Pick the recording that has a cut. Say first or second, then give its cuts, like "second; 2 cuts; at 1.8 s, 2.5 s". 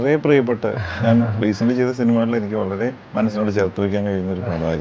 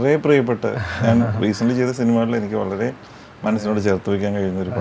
first; 1 cut; at 3.0 s